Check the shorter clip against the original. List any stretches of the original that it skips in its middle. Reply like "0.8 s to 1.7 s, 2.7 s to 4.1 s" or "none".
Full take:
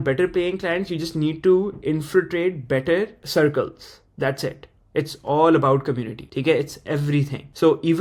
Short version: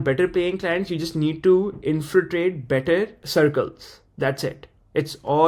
none